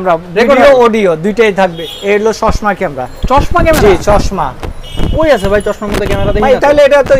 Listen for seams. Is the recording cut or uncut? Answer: cut